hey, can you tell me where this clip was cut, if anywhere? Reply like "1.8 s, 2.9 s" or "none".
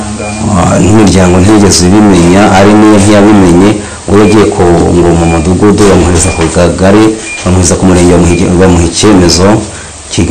none